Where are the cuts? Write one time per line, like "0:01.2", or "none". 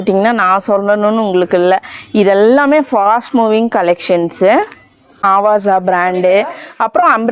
0:05.2